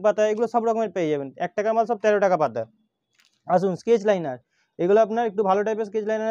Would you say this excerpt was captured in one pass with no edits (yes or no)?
yes